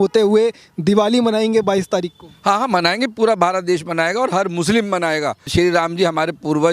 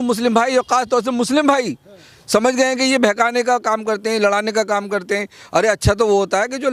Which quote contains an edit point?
first; 1 cut; at 5.4 s

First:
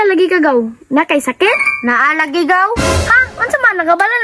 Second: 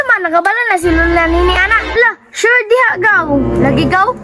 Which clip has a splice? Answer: second; 1 cut; at 1.9 s

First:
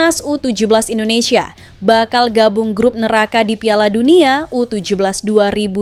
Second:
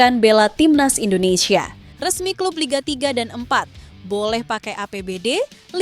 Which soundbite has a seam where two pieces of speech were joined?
second; 1 cut; at 1.8 s

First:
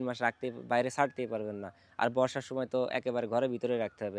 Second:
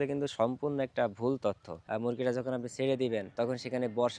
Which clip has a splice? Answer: second; 2 cuts; at 1.7 s, 3.3 s

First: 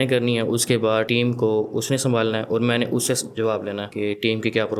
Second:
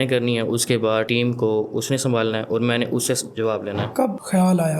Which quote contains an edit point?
second; 1 cut; at 3.8 s

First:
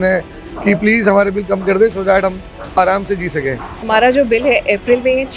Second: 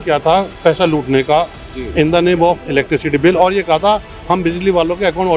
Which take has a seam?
first; 1 cut; at 3.8 s

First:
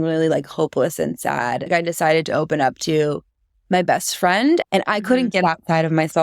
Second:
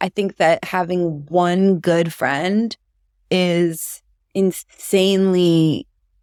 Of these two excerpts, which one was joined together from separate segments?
first; 2 cuts; at 1.7 s, 4.6 s

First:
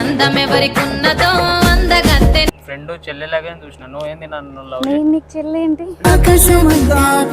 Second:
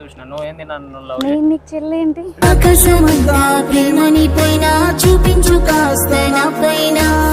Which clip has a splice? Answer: first; 1 cut; at 2.6 s

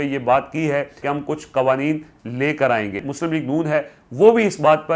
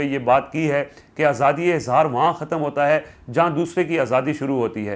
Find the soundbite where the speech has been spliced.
first; 2 cuts; at 1.0 s, 3.1 s

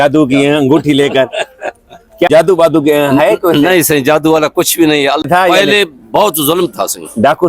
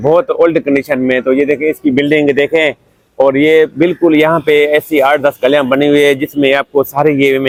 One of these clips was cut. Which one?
first; 2 cuts; at 2.3 s, 5.2 s

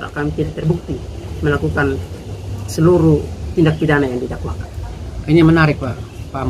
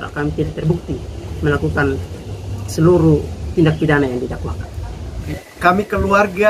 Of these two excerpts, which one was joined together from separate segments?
second; 1 cut; at 5.1 s

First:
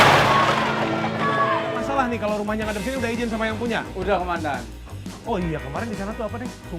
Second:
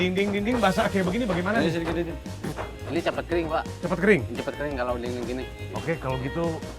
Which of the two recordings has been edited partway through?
first; 1 cut; at 1.9 s

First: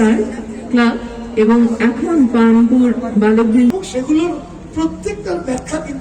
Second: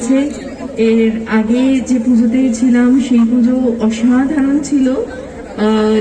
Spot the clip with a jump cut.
first; 1 cut; at 3.7 s

